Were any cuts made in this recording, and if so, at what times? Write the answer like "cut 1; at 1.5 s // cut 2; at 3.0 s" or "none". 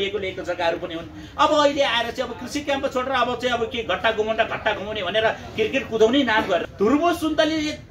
cut 1; at 6.6 s

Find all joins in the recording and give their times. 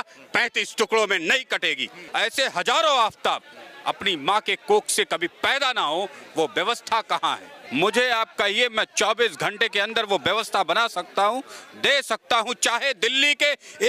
cut 1; at 2.0 s // cut 2; at 7.5 s

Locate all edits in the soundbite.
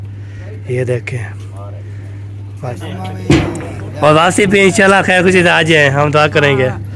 cut 1; at 2.8 s

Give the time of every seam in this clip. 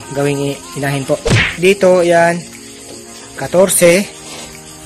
cut 1; at 1.4 s

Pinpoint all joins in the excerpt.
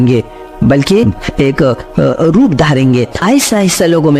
cut 1; at 3.2 s

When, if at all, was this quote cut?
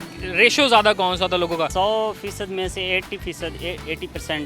cut 1; at 1.7 s

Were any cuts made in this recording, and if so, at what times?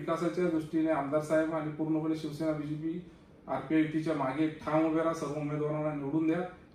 none

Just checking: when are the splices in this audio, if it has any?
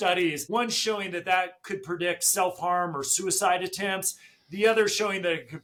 none

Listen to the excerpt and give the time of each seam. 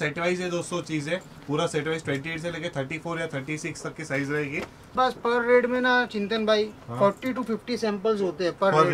cut 1; at 5.0 s

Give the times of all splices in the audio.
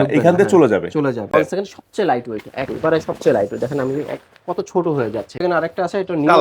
cut 1; at 1.3 s // cut 2; at 5.4 s

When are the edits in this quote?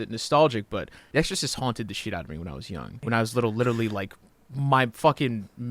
cut 1; at 1.0 s // cut 2; at 3.0 s

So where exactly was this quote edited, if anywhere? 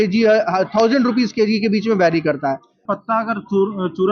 cut 1; at 2.8 s

